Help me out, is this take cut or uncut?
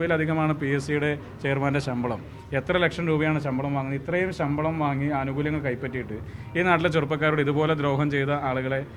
uncut